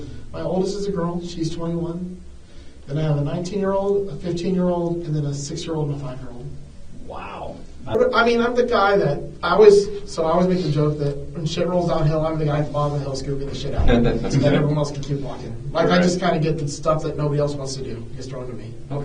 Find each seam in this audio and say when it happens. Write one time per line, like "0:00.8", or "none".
0:07.9